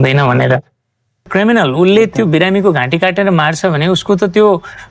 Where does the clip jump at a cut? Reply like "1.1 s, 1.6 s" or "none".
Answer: 1.3 s

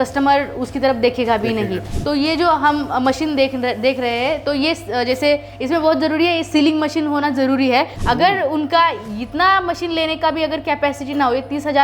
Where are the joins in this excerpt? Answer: 1.9 s, 8.0 s

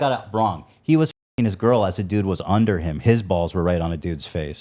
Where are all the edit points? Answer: none

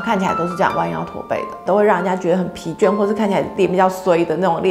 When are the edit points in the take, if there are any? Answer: 1.6 s, 3.5 s

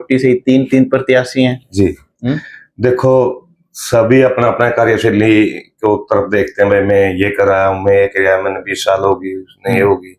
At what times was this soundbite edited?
none

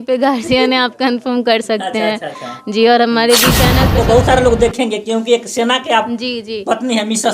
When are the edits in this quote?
3.9 s

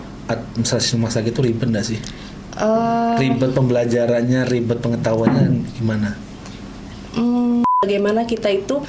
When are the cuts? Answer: 7.7 s

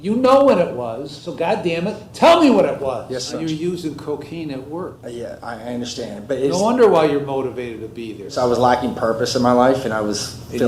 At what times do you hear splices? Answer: 1.4 s, 3.3 s, 5.0 s, 8.2 s

